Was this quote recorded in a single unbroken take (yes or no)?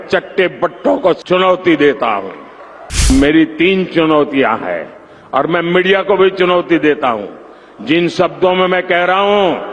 no